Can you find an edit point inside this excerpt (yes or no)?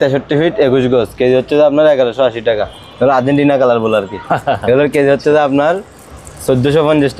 yes